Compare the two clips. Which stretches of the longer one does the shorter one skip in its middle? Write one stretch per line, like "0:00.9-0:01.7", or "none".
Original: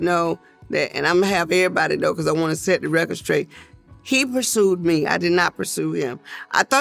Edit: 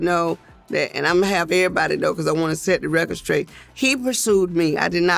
0:03.6-0:03.9